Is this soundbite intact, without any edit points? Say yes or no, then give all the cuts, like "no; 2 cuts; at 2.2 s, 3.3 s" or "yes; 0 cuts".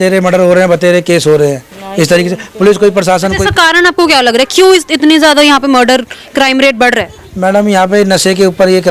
yes; 0 cuts